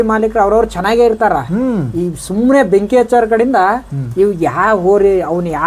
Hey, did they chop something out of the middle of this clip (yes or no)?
no